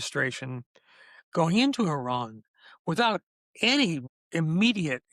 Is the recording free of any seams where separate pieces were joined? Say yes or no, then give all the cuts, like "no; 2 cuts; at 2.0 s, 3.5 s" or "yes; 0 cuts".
no; 1 cut; at 4.1 s